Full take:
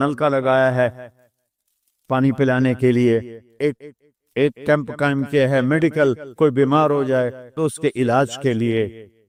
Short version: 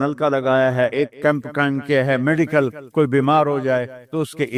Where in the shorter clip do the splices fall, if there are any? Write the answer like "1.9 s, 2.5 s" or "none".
0.9 s